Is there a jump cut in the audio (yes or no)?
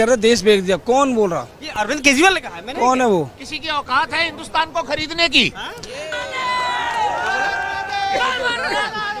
no